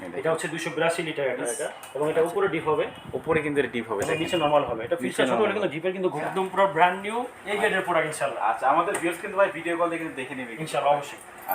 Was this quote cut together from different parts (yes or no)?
yes